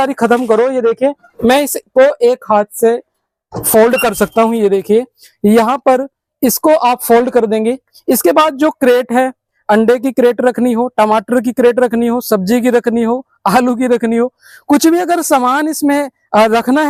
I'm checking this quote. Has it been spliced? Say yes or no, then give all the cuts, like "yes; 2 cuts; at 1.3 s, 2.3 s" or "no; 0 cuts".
no; 0 cuts